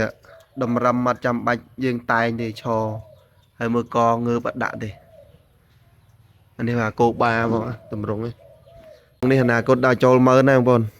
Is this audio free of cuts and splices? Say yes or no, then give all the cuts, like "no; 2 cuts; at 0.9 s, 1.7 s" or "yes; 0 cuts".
no; 1 cut; at 9.2 s